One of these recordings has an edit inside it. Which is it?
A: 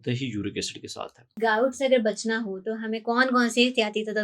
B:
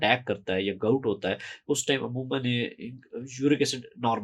A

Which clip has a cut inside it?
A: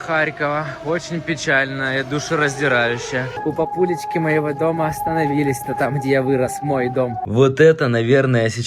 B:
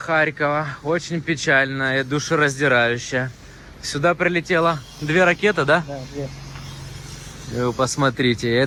A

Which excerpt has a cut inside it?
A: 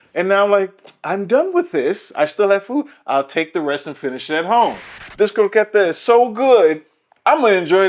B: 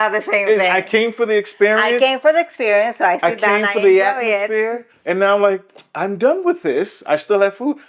A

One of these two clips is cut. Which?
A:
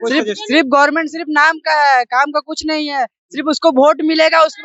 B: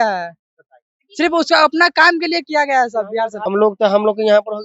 B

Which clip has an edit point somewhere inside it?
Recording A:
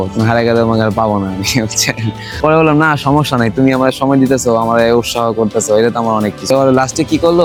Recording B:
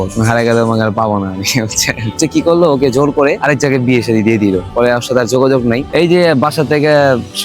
B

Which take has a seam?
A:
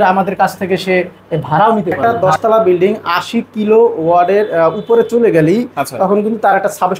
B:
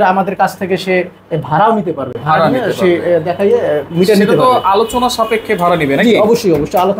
A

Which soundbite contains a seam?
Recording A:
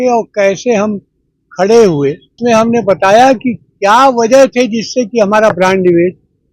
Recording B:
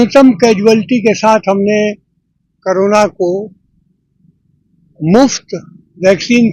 A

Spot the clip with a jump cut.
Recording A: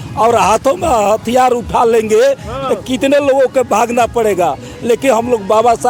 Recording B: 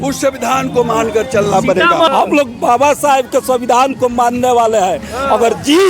B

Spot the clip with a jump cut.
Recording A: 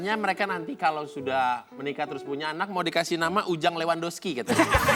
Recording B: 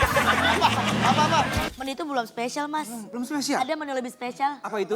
B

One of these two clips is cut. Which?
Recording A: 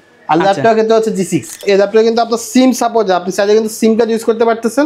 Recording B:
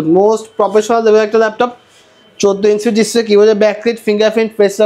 A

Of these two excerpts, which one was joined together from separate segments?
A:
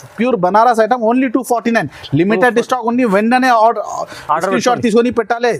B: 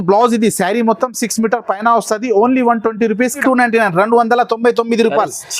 B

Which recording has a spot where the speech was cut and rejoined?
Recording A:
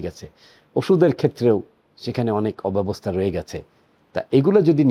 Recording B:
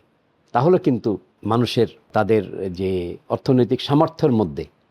B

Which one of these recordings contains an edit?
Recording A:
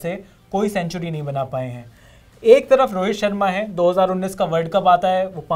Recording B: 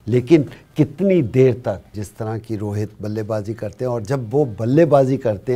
B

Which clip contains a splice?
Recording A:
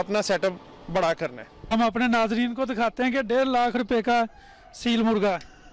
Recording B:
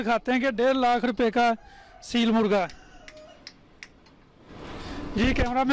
A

